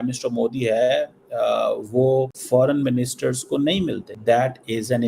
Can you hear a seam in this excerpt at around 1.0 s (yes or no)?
no